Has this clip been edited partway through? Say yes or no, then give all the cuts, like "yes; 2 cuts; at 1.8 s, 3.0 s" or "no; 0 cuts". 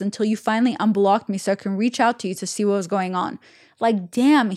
no; 0 cuts